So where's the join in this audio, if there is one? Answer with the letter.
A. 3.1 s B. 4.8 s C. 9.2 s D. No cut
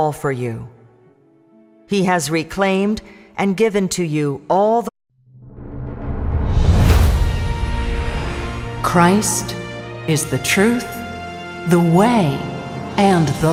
D